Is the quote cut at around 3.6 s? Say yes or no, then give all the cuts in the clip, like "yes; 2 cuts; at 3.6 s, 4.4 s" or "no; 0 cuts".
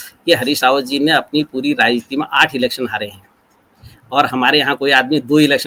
no; 0 cuts